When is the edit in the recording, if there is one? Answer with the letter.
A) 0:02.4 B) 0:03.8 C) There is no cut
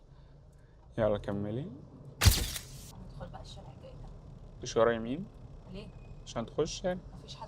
A